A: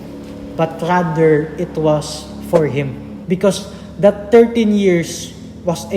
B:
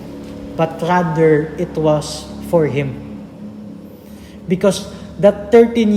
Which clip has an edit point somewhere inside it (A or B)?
A